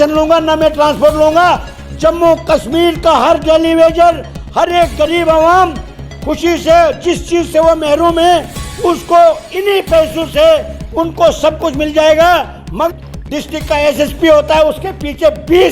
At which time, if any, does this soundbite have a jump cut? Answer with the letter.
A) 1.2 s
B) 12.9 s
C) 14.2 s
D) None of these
B